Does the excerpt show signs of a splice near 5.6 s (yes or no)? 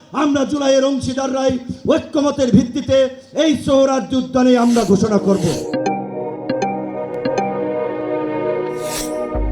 no